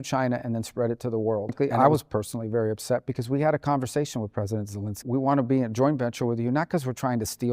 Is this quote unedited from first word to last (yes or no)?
no